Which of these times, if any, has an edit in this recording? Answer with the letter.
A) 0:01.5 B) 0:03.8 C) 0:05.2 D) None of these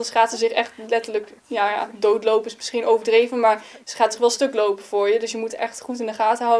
D